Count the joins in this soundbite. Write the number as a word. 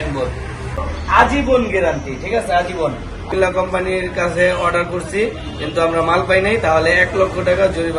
two